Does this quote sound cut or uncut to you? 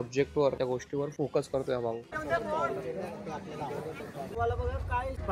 cut